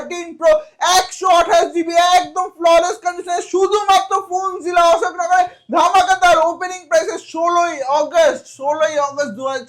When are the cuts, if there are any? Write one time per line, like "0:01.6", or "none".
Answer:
none